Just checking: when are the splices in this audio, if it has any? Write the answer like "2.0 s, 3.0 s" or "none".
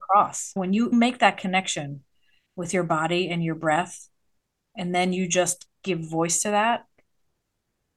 none

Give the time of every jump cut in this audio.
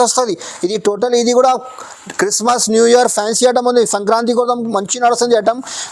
none

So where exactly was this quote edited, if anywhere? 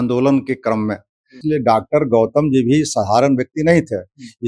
1.4 s

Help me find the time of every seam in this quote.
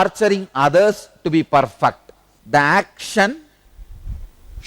2.1 s

